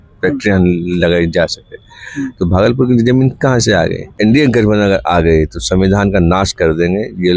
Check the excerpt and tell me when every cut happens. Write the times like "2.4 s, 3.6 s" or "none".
4.1 s